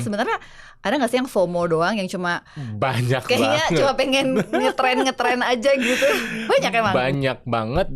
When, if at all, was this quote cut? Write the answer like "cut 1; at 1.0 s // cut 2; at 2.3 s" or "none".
cut 1; at 6.9 s